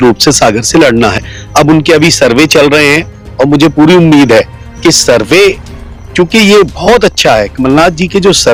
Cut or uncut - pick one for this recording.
uncut